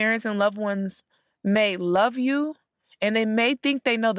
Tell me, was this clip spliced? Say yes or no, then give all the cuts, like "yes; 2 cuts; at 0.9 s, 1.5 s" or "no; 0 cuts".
no; 0 cuts